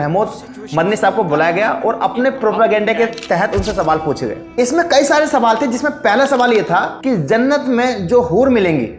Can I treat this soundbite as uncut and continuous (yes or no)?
yes